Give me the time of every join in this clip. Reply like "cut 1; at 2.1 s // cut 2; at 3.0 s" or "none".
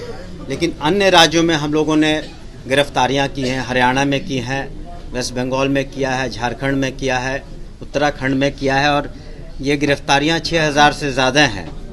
none